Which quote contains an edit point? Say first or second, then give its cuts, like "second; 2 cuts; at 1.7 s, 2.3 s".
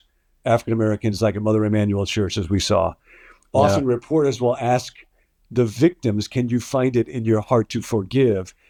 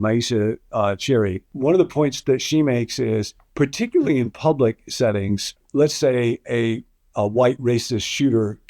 second; 2 cuts; at 1.4 s, 5.6 s